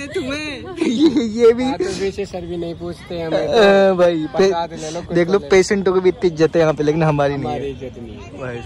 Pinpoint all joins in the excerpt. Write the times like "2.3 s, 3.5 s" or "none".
none